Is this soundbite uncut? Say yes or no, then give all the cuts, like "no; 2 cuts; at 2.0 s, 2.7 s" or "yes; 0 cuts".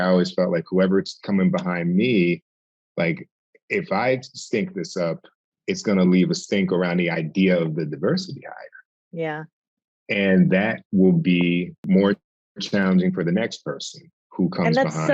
no; 1 cut; at 11.7 s